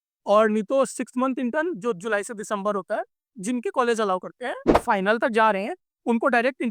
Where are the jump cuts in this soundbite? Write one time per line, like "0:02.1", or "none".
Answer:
0:04.8